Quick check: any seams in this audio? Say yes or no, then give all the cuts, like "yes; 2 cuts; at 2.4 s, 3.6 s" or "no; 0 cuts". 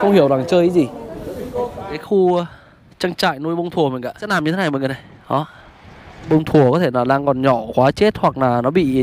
yes; 3 cuts; at 2.0 s, 4.2 s, 6.3 s